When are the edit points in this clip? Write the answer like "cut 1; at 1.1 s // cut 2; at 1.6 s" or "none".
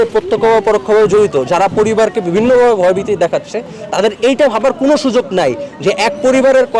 none